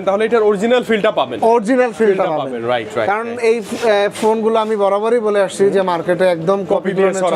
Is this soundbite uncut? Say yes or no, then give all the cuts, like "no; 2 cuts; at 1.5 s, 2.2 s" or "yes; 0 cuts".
yes; 0 cuts